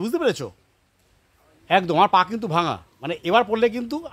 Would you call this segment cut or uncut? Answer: uncut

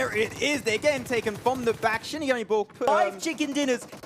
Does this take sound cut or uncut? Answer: cut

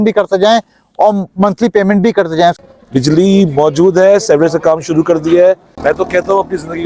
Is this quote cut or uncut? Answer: cut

